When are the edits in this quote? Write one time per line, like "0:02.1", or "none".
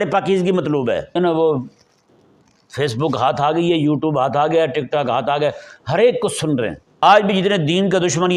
0:01.2
0:07.0